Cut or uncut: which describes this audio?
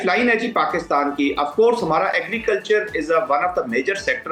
uncut